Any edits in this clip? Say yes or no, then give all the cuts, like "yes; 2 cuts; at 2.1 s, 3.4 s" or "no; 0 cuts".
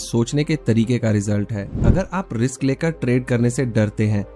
yes; 1 cut; at 1.8 s